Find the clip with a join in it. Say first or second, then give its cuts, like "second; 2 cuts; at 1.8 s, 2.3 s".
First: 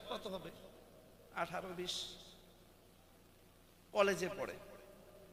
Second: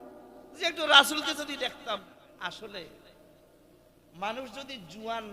second; 1 cut; at 2.2 s